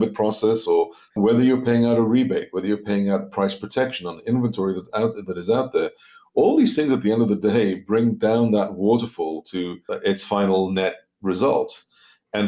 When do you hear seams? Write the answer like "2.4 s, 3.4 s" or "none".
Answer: 1.0 s, 9.9 s